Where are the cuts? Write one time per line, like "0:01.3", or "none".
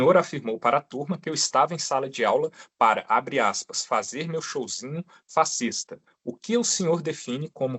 none